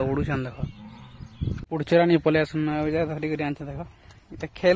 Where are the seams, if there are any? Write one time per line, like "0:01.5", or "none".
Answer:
0:01.6